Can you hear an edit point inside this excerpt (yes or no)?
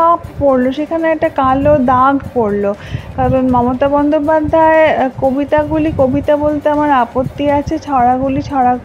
no